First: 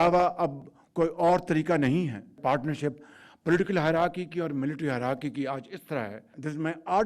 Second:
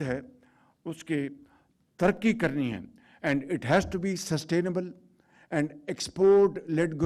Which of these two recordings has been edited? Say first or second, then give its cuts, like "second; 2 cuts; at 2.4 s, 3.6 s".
first; 1 cut; at 2.2 s